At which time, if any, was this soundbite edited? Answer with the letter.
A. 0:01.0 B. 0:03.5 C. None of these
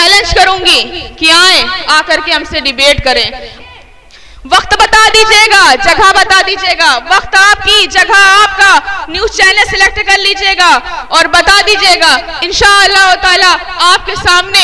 B